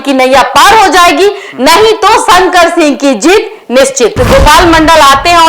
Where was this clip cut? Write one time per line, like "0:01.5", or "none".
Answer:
0:04.1